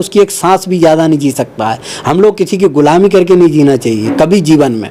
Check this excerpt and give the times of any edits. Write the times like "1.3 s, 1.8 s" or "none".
none

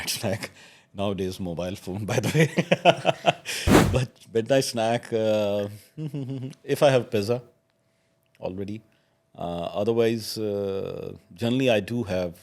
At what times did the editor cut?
none

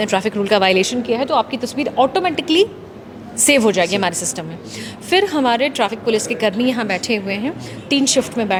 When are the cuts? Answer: none

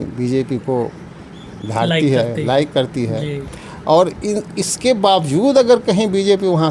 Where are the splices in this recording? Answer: none

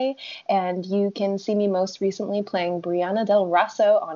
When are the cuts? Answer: none

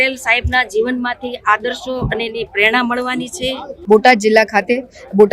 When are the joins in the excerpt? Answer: 3.7 s

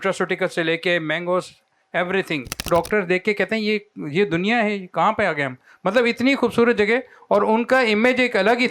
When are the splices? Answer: 2.7 s

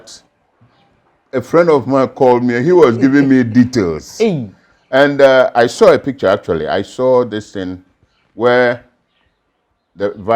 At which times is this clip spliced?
none

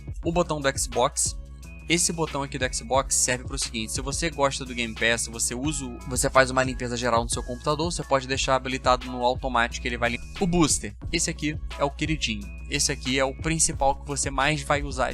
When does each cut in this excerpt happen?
5.9 s, 10.3 s

